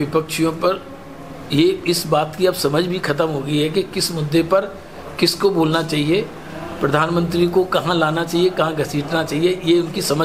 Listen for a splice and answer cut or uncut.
uncut